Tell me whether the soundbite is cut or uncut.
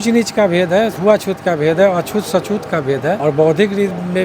cut